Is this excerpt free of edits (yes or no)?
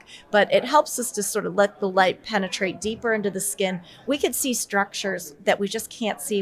yes